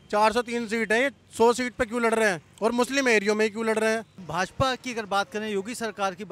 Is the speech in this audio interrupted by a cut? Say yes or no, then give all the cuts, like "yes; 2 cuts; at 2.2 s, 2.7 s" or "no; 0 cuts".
yes; 1 cut; at 4.2 s